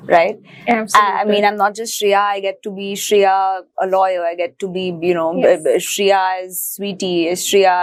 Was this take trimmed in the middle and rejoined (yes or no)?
no